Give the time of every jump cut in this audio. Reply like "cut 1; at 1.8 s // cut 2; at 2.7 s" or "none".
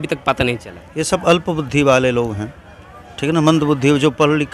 none

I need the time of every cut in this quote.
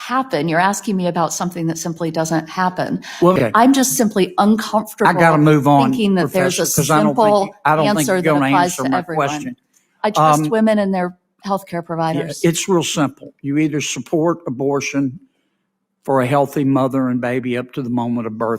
cut 1; at 3.4 s

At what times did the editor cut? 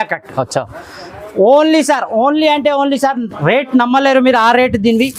none

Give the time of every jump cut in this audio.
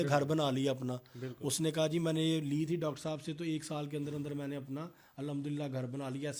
none

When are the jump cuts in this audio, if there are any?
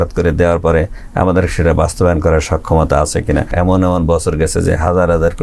cut 1; at 3.5 s

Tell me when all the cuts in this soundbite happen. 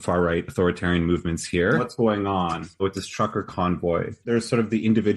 cut 1; at 1.9 s // cut 2; at 4.3 s

